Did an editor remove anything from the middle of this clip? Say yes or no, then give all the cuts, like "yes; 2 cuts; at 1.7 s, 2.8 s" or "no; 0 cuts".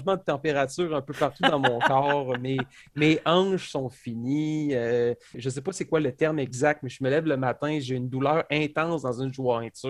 yes; 1 cut; at 5.4 s